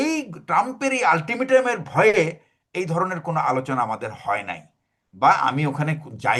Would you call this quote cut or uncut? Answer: uncut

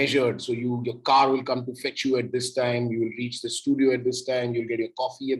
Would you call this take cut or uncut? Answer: uncut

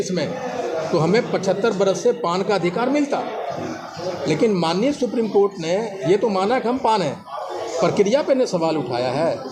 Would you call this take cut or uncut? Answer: uncut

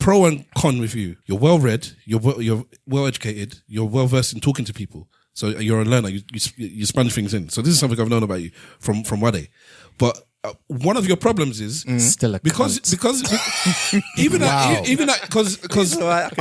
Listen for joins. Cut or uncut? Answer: cut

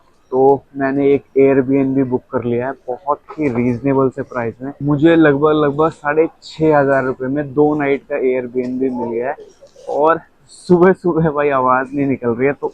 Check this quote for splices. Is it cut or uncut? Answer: uncut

